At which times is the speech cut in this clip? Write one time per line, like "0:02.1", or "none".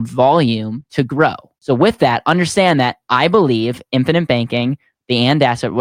0:01.5